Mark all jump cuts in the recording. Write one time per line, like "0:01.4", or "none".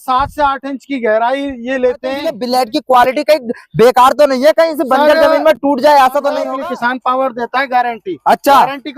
0:02.3
0:06.5